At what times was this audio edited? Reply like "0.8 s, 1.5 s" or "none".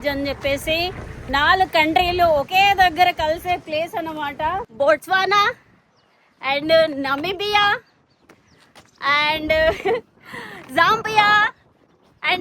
1.1 s, 4.6 s